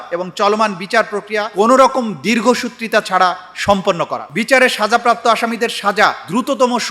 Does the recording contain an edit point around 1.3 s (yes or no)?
no